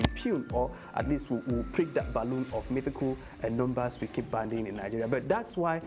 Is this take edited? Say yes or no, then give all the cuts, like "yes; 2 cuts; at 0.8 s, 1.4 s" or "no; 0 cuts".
no; 0 cuts